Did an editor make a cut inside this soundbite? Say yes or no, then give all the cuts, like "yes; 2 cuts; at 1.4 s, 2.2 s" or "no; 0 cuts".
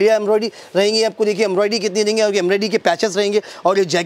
no; 0 cuts